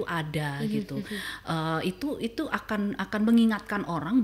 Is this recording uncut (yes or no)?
yes